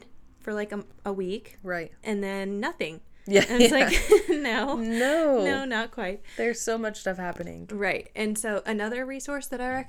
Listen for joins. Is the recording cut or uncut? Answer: uncut